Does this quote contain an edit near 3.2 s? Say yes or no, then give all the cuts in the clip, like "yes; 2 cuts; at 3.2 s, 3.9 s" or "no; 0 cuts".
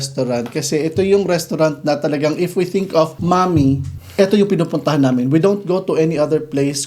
yes; 2 cuts; at 3.2 s, 4.0 s